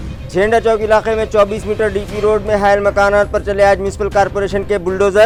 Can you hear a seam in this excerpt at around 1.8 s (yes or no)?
no